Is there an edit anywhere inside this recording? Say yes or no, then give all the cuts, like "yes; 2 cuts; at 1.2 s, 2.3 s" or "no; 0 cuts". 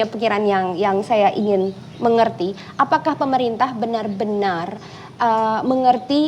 no; 0 cuts